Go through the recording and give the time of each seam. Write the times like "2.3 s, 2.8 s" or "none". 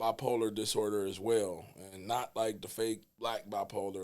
3.1 s